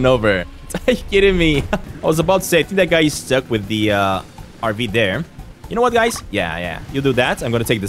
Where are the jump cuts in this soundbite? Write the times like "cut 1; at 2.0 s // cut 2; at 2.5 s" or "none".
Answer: cut 1; at 1.9 s // cut 2; at 4.4 s